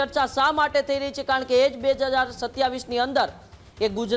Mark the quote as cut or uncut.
uncut